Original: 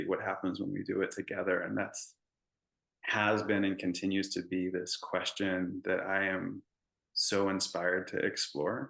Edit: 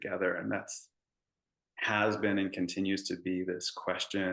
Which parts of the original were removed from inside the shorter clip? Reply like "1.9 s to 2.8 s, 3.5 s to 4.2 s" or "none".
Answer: none